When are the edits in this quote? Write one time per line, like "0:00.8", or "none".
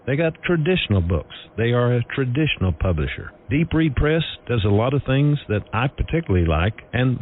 0:06.0